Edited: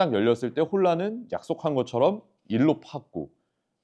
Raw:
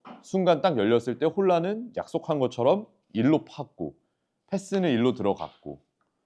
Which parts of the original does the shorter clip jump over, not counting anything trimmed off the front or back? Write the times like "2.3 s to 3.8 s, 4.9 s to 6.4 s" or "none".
none